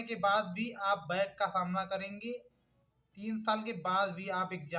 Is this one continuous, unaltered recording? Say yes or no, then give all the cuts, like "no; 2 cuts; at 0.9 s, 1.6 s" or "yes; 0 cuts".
yes; 0 cuts